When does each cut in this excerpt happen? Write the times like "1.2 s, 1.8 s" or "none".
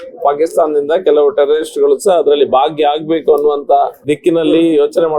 4.0 s